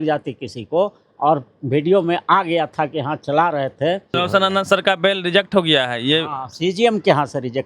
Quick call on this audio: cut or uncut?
cut